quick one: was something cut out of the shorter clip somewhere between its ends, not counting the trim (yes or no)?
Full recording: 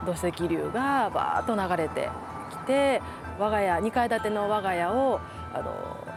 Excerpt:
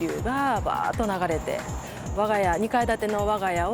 yes